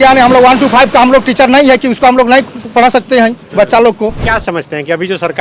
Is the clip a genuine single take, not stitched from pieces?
no; 1 cut; at 4.2 s

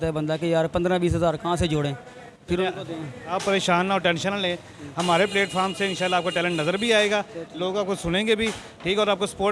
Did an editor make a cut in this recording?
no; 0 cuts

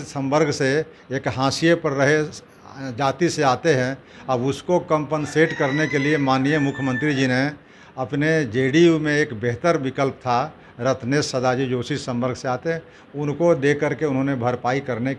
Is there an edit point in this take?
no; 0 cuts

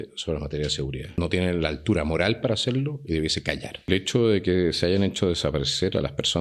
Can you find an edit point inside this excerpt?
yes; 2 cuts; at 1.2 s, 3.7 s

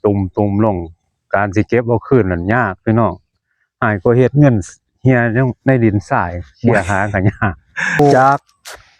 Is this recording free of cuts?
no; 1 cut; at 8.0 s

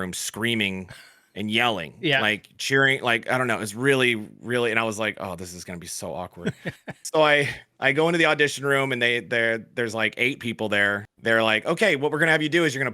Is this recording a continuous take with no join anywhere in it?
no; 1 cut; at 11.1 s

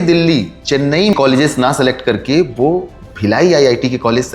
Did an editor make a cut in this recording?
yes; 1 cut; at 1.1 s

